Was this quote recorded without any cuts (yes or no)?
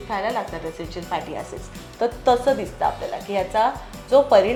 yes